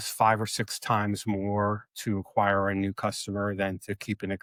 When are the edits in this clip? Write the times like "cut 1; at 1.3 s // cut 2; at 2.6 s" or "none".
none